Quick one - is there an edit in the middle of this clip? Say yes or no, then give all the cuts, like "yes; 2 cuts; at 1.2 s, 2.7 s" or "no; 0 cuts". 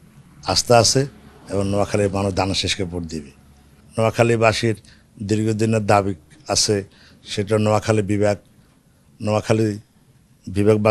yes; 1 cut; at 3.8 s